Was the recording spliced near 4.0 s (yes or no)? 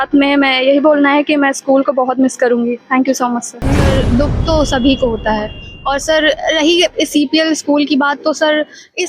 yes